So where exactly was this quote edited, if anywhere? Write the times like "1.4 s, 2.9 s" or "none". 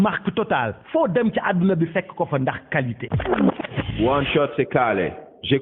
3.0 s

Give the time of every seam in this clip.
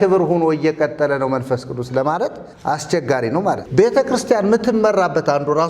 2.5 s, 3.6 s

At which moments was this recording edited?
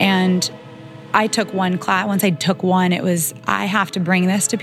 1.1 s

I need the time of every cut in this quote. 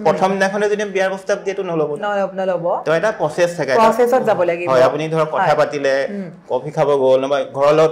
none

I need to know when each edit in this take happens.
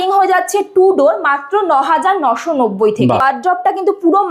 3.2 s

